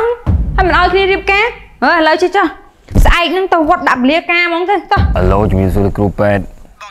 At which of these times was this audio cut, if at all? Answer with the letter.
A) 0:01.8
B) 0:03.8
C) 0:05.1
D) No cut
C